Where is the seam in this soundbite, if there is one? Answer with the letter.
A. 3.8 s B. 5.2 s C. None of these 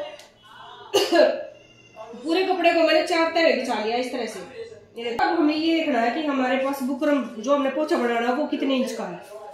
B